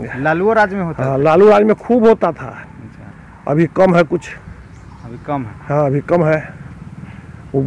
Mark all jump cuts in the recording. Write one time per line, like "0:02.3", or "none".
none